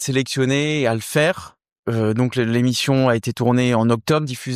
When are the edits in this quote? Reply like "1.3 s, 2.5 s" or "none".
1.7 s